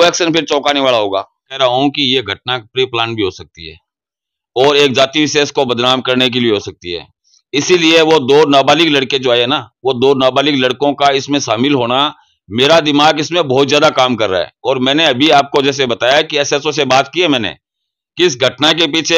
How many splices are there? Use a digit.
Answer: 1